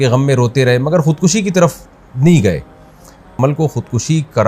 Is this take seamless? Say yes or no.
no